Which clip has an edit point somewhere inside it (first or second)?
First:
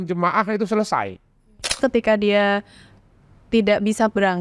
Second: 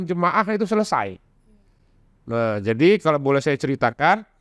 first